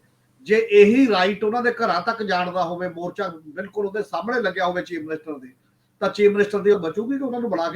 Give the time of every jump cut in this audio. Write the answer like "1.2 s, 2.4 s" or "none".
6.7 s

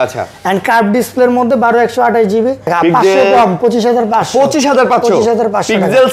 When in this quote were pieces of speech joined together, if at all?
2.7 s

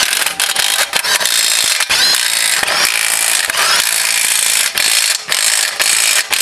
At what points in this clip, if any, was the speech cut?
none

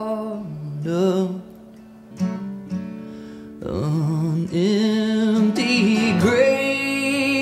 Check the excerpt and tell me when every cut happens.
none

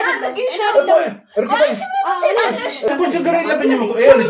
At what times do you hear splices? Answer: 2.9 s

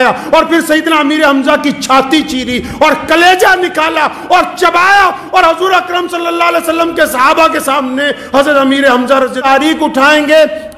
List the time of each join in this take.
9.4 s

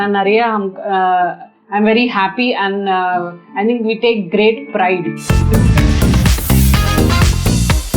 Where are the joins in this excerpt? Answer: 5.2 s

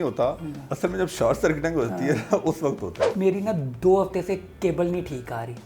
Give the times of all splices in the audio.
3.0 s

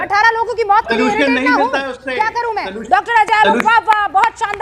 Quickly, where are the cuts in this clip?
none

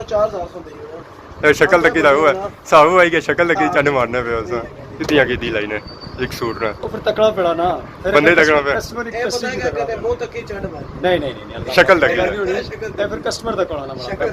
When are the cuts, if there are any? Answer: 4.8 s

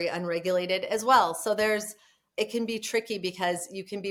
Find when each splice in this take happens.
none

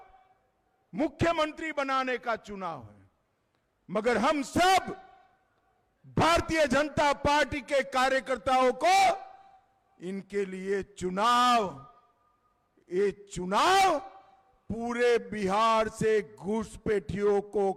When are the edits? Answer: none

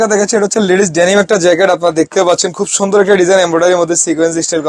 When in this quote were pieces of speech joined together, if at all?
none

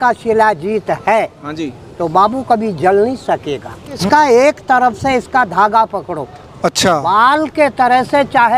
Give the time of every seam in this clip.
4.0 s

